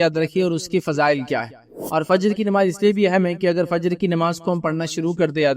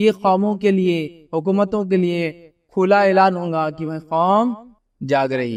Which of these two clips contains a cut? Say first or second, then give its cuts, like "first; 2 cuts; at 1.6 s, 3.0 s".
first; 1 cut; at 1.8 s